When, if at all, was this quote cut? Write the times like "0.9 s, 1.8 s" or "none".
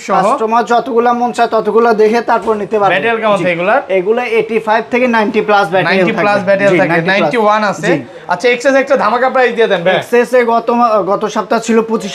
none

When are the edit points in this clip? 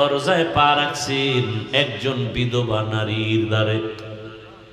none

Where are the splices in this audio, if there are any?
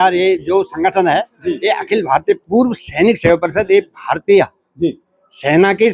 none

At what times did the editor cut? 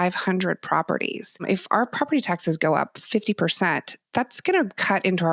1.4 s

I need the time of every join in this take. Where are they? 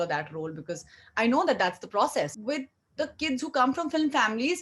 2.4 s

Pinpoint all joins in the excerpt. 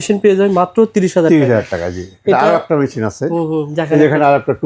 none

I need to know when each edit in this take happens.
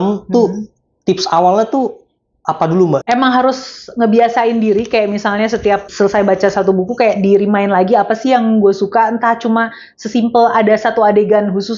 3.0 s

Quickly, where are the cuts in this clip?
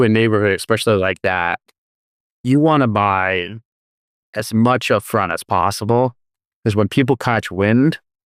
none

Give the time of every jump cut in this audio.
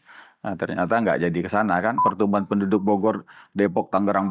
2.0 s

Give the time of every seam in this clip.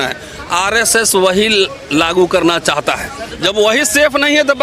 3.3 s

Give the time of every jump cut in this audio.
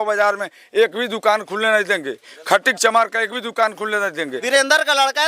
4.4 s

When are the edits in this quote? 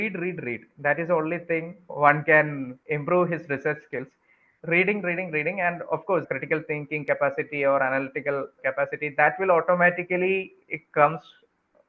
none

